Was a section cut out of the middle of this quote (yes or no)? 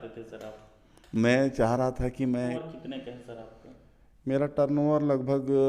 yes